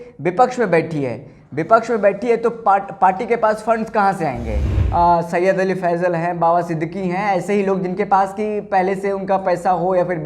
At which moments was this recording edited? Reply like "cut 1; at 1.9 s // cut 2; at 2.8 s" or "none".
cut 1; at 4.8 s